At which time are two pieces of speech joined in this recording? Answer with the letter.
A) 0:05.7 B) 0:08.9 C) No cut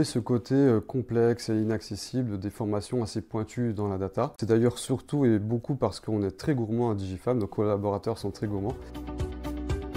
B